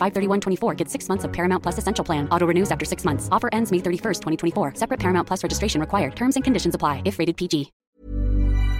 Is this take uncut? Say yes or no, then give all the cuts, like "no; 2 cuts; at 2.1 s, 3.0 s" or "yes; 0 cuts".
no; 1 cut; at 7.8 s